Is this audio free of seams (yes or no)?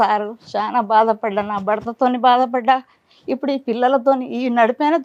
yes